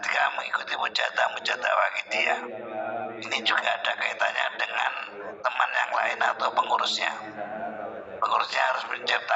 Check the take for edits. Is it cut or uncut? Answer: uncut